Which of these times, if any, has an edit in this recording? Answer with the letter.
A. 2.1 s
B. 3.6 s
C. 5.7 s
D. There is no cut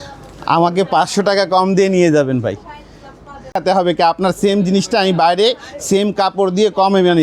B